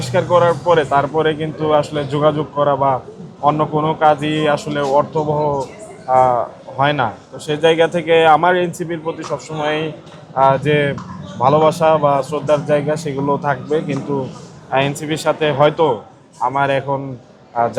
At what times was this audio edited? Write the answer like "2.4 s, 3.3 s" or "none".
none